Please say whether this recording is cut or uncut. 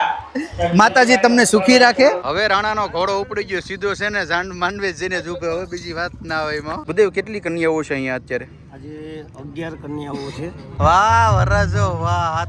cut